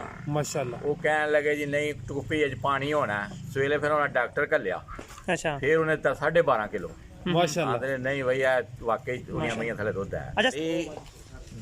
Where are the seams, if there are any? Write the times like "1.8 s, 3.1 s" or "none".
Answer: 10.5 s